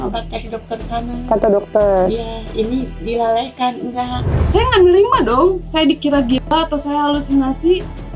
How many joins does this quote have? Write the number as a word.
one